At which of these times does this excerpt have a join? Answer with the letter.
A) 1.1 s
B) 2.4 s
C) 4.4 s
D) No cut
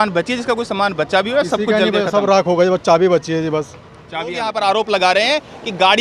C